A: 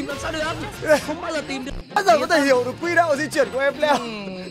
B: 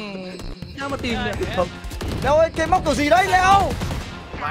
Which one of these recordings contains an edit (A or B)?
B